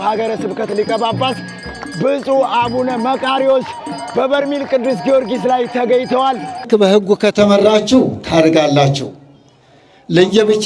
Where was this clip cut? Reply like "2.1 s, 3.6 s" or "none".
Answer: 6.7 s